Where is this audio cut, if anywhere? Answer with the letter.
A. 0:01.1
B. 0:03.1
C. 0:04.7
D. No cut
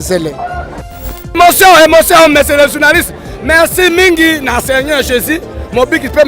A